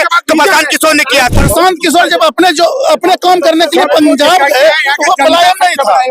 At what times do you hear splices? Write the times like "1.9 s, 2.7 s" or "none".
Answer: 1.3 s